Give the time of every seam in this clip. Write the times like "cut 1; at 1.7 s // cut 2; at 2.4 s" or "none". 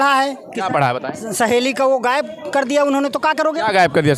none